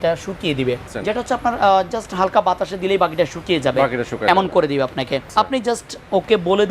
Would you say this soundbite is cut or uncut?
cut